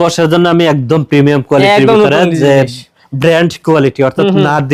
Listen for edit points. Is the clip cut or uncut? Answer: uncut